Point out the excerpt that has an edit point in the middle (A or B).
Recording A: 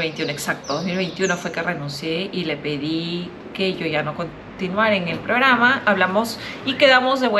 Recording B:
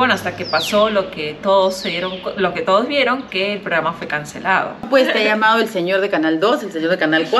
B